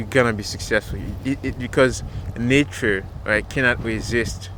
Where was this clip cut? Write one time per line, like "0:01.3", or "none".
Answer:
none